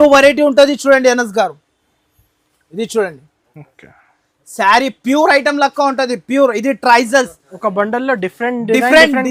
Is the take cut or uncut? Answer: uncut